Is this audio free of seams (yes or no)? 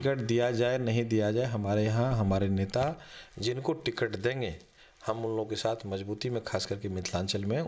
yes